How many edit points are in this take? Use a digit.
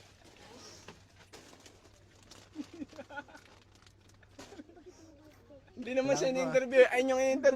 1